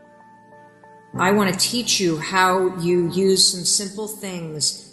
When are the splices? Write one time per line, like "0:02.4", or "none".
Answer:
0:01.1